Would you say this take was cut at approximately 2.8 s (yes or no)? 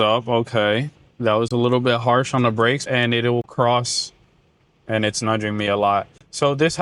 yes